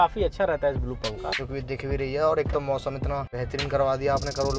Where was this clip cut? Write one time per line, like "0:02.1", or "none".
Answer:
0:01.8
0:03.3